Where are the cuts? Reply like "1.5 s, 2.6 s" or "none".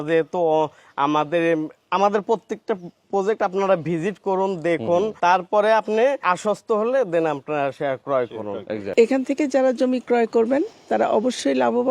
5.1 s, 6.2 s, 8.9 s